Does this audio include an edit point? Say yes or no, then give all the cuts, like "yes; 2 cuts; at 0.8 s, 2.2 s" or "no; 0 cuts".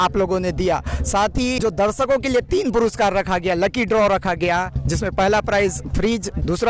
yes; 1 cut; at 1.6 s